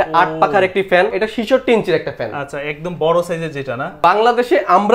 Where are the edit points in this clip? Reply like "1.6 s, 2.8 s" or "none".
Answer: 1.1 s, 4.0 s

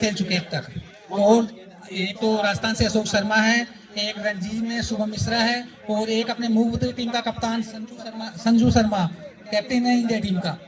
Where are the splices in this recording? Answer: none

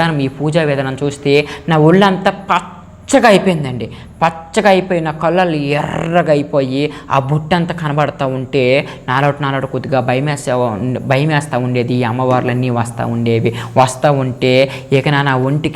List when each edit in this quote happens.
none

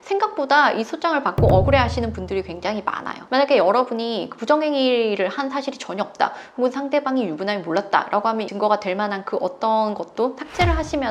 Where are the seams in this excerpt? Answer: 3.2 s, 8.5 s

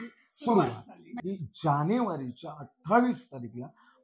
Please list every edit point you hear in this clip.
1.1 s

